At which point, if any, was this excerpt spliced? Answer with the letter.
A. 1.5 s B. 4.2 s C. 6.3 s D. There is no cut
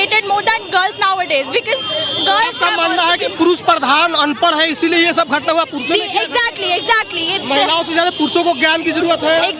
D